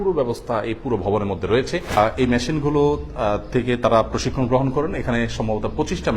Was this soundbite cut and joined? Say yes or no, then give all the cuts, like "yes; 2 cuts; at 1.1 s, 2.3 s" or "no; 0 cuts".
yes; 1 cut; at 1.9 s